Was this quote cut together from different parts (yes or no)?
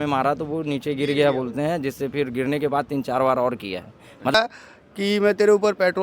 yes